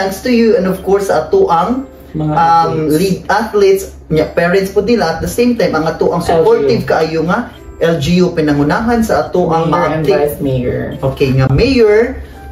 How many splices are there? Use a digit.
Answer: 1